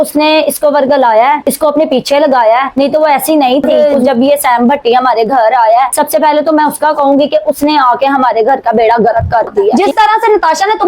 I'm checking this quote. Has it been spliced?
yes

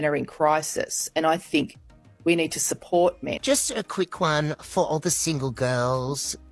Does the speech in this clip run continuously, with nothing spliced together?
no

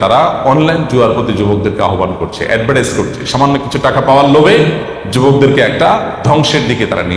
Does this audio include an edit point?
no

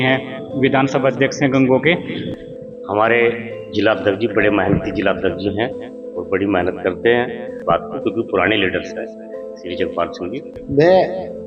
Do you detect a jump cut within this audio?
yes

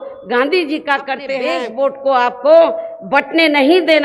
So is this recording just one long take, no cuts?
no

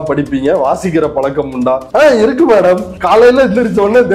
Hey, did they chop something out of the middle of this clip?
yes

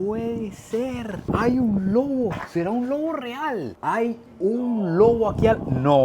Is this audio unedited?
no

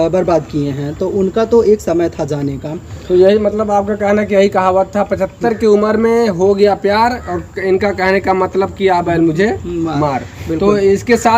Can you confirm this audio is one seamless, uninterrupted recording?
yes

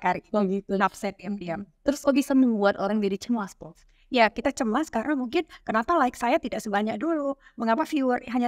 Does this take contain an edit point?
yes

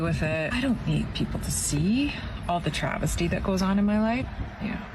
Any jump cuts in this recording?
yes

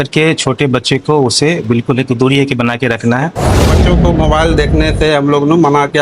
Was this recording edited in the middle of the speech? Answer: yes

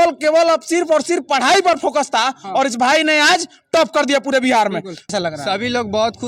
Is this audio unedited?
no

